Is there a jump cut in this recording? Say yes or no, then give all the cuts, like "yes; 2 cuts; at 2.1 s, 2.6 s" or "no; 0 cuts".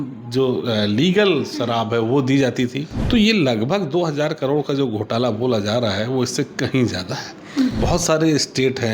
yes; 2 cuts; at 2.9 s, 7.8 s